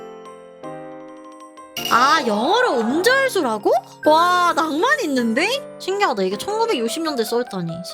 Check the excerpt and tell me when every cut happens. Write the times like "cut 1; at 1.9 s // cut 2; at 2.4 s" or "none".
cut 1; at 1.9 s